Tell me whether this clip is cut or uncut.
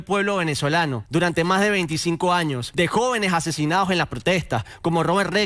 cut